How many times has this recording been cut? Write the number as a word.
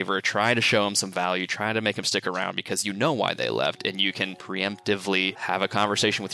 two